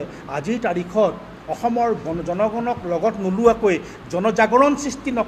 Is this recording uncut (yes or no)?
yes